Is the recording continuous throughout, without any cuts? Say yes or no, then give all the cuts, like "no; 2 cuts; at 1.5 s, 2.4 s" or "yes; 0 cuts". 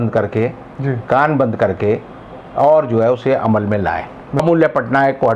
no; 1 cut; at 4.4 s